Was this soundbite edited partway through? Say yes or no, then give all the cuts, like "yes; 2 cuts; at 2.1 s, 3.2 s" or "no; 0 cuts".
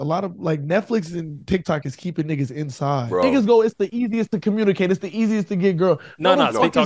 yes; 1 cut; at 3.2 s